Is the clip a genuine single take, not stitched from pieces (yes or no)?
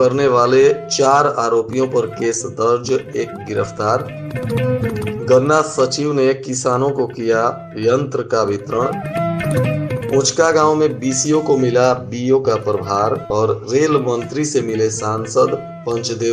yes